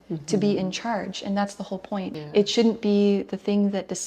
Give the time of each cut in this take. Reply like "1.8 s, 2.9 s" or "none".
2.2 s